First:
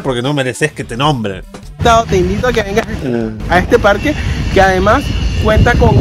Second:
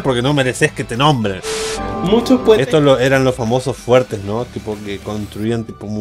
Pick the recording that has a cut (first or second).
second